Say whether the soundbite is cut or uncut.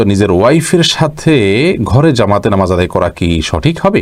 uncut